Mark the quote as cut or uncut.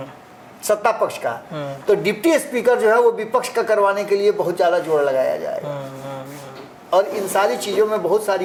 uncut